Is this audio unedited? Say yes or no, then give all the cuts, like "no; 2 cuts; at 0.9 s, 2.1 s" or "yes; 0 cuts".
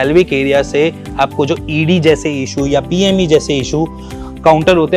yes; 0 cuts